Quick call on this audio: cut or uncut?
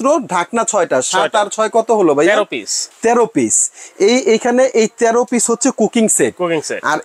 uncut